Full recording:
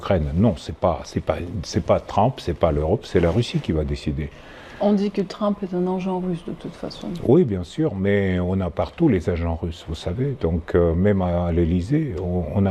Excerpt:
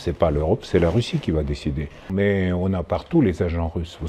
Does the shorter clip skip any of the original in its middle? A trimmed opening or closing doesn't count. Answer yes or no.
yes